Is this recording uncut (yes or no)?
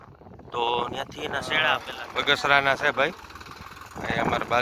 no